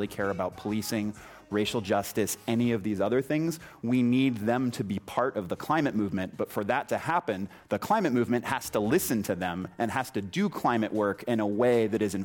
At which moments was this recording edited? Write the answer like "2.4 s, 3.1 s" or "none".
none